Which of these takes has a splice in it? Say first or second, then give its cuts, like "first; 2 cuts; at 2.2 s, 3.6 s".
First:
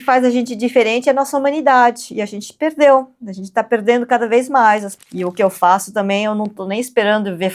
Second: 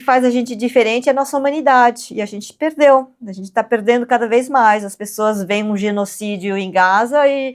first; 1 cut; at 5.0 s